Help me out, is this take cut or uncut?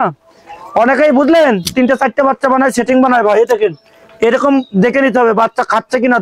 uncut